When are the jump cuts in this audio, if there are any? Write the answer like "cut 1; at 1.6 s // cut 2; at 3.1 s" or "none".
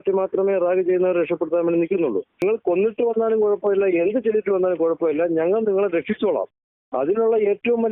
cut 1; at 2.4 s